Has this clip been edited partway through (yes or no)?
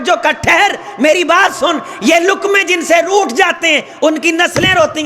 no